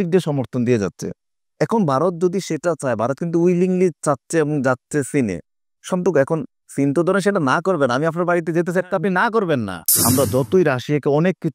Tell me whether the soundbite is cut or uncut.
cut